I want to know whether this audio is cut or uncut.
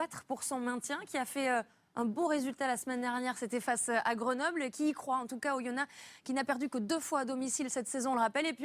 cut